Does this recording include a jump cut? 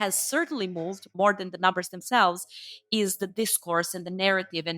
yes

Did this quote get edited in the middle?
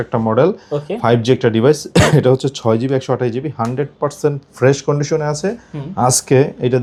no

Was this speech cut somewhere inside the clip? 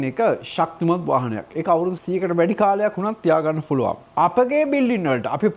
yes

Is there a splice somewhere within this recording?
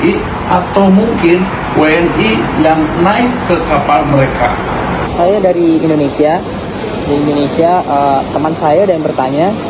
yes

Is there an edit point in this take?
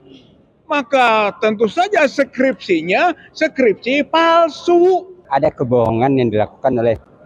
yes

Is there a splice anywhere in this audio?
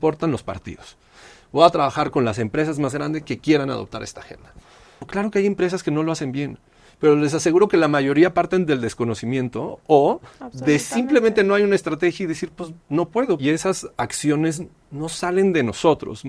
yes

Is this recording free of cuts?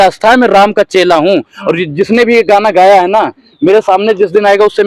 yes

